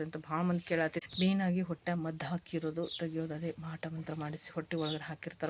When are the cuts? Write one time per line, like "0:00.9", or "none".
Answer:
0:01.0